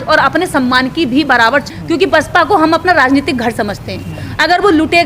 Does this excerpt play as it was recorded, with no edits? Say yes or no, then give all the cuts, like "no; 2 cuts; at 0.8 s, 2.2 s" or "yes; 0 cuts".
no; 1 cut; at 1.7 s